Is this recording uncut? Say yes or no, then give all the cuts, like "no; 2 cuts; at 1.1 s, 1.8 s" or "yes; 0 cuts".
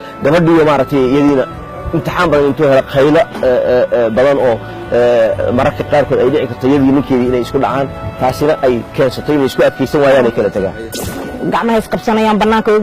no; 1 cut; at 10.9 s